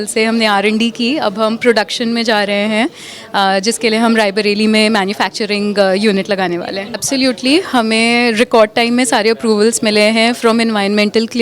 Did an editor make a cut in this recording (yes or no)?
yes